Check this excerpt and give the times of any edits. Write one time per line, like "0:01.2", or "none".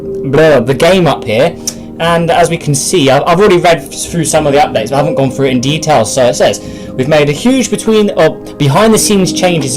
0:02.9